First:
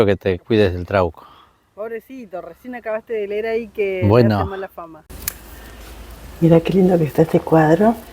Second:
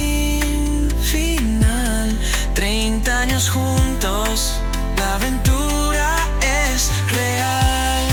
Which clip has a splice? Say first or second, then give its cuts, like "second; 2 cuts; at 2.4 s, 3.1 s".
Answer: first; 1 cut; at 5.3 s